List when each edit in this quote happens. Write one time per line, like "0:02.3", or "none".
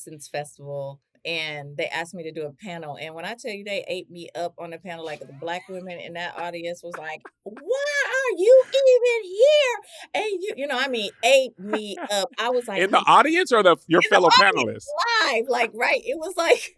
0:01.1